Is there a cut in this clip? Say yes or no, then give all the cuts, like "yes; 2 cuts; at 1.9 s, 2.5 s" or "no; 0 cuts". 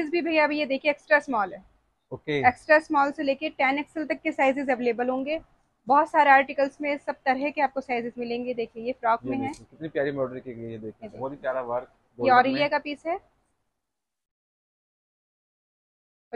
no; 0 cuts